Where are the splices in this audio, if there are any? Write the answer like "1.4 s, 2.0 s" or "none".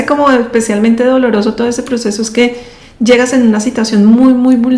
none